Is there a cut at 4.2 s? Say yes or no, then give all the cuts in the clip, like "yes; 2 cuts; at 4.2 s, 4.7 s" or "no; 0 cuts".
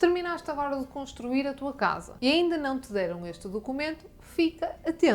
no; 1 cut; at 2.1 s